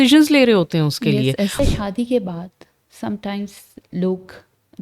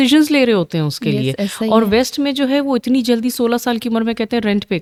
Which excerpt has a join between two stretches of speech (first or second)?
first